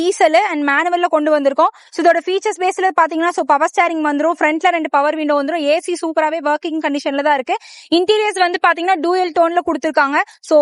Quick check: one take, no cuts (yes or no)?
yes